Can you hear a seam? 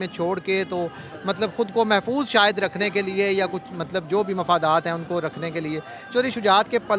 no; 0 cuts

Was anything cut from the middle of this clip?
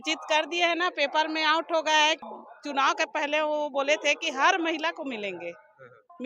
yes; 1 cut; at 2.3 s

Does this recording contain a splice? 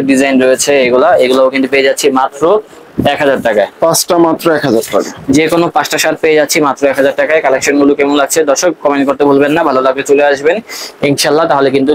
no; 0 cuts

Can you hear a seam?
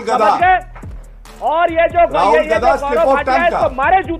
no; 0 cuts

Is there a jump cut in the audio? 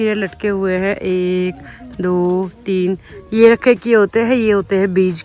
no; 0 cuts

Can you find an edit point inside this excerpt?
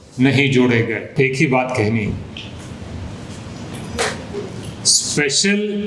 yes; 1 cut; at 1.1 s

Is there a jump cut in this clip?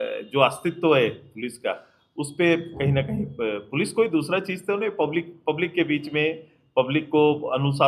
no; 0 cuts

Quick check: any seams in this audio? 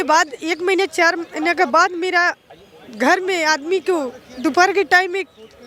no; 0 cuts

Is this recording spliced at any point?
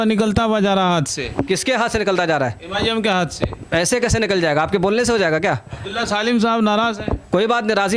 no; 0 cuts

